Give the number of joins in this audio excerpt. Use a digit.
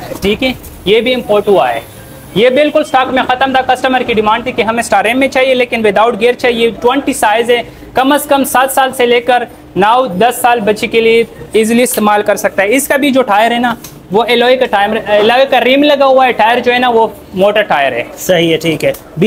0